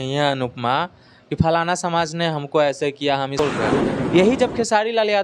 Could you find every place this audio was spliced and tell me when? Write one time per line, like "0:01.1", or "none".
0:03.4